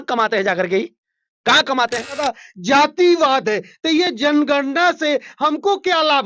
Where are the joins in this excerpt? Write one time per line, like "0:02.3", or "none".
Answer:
0:02.2